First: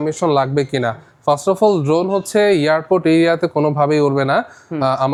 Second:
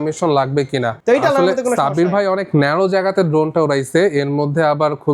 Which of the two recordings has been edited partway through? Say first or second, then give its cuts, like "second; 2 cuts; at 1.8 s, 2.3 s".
second; 1 cut; at 1.0 s